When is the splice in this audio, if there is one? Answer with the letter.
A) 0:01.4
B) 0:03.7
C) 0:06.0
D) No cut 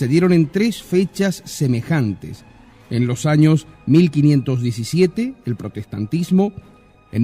B